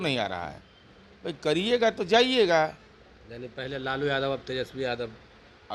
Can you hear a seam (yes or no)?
no